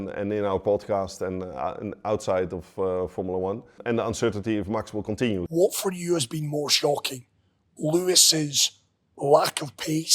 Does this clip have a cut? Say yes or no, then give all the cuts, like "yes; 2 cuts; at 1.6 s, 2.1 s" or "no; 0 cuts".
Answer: yes; 2 cuts; at 3.8 s, 5.4 s